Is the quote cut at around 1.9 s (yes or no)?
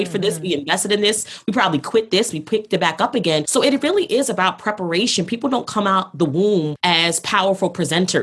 no